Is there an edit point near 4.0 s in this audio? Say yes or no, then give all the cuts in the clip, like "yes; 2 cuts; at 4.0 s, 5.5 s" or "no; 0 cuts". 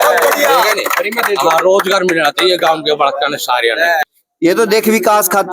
yes; 1 cut; at 4.0 s